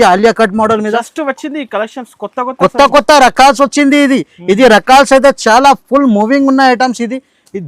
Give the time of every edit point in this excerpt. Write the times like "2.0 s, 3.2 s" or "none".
none